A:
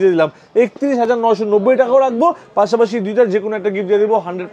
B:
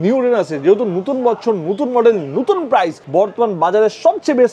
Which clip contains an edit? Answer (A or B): B